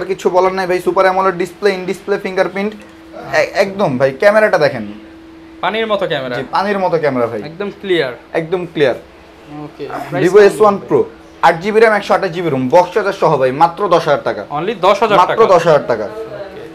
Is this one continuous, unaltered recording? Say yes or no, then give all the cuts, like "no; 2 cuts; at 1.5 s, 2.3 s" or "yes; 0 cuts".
yes; 0 cuts